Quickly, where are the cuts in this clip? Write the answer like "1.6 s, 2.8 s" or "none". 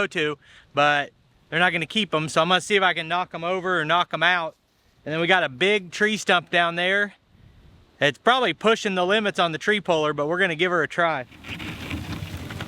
11.4 s